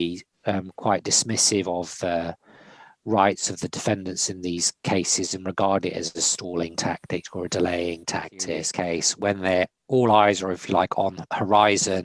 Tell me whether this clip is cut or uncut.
cut